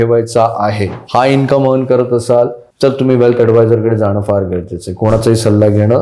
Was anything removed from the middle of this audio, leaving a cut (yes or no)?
yes